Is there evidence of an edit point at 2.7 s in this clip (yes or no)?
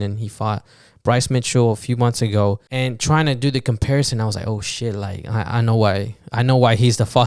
yes